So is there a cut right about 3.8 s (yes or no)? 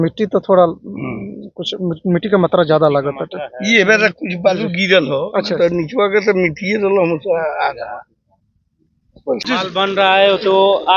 no